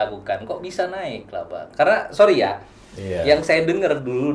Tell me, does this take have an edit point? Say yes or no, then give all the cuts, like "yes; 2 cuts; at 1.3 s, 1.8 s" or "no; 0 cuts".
no; 0 cuts